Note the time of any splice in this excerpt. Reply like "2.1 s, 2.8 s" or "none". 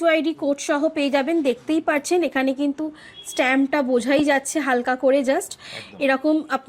none